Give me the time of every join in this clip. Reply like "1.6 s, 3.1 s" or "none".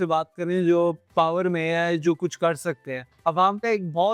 1.0 s, 3.1 s